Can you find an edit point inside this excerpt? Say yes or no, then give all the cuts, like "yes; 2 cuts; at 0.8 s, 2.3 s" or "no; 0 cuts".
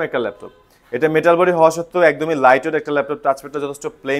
no; 0 cuts